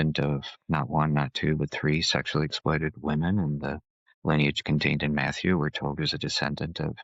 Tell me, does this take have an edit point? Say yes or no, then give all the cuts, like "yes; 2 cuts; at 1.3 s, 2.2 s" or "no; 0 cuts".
no; 0 cuts